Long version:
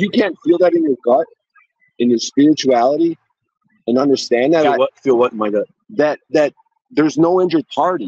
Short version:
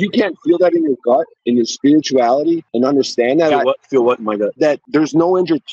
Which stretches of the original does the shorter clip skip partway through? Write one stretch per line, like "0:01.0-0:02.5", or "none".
0:01.3-0:01.9
0:03.2-0:03.8
0:05.8-0:06.7